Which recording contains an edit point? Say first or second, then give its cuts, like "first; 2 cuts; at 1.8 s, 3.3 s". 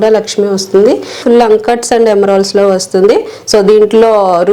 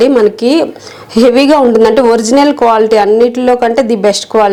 first; 1 cut; at 1.2 s